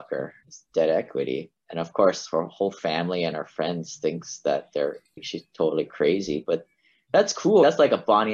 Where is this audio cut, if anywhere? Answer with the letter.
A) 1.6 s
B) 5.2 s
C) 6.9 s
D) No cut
B